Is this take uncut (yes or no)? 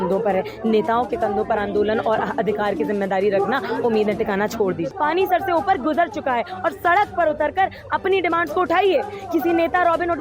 no